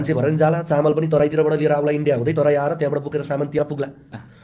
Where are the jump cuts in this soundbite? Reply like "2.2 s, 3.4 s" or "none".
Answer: 2.2 s